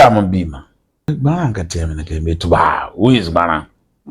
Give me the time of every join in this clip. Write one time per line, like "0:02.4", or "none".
0:01.1